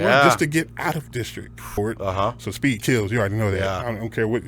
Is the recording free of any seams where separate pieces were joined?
no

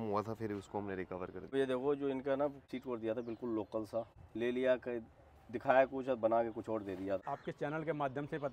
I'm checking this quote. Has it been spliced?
yes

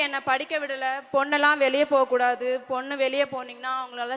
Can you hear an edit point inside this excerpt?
no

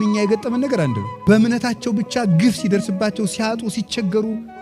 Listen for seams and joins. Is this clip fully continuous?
no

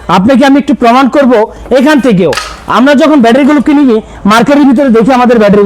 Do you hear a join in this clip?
no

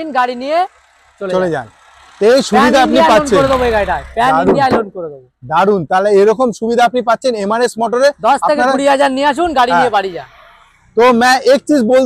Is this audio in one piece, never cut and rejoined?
yes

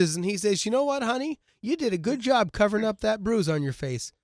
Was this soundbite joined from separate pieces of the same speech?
no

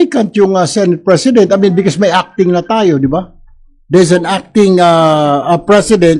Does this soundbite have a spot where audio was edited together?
no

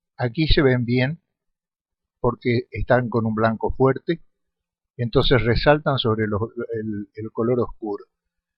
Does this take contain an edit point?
no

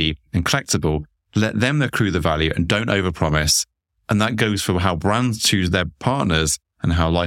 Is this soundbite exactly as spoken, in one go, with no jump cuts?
yes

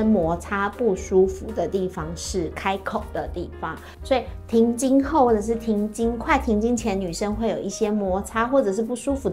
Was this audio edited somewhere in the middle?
no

